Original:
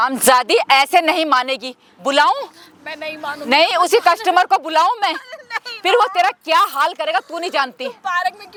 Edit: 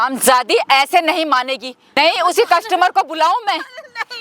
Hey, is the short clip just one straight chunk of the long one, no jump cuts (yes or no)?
no